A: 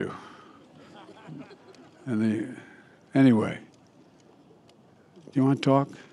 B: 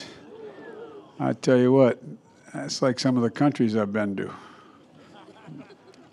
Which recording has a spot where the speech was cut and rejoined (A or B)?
A